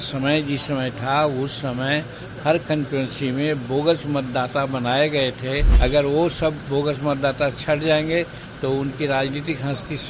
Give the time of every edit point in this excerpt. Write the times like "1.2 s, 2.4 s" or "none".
5.7 s